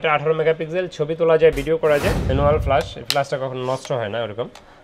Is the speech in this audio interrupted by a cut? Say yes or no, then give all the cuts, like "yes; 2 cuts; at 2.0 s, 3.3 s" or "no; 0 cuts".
yes; 1 cut; at 2.2 s